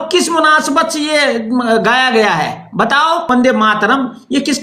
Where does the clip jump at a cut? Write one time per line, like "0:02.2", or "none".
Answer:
0:03.3